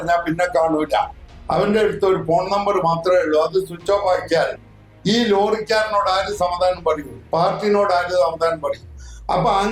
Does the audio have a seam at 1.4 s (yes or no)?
no